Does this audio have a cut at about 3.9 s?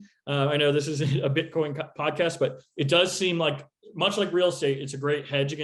no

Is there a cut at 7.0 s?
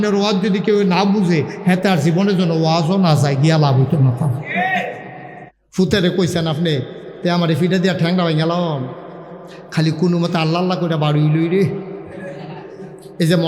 no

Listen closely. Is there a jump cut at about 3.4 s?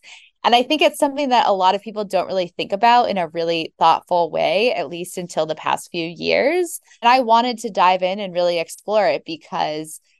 no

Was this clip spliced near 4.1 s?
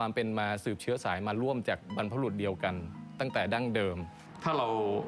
yes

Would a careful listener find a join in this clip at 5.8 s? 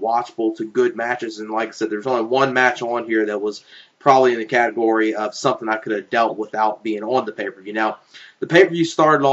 yes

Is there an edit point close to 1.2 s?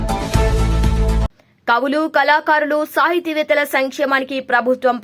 yes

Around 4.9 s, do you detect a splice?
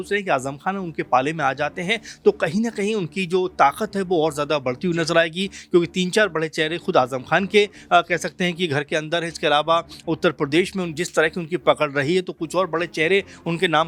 no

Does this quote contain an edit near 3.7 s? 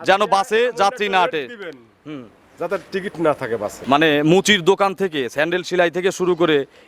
yes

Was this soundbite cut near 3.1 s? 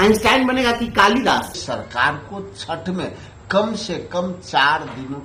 no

